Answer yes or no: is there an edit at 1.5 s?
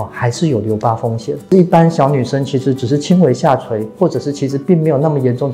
yes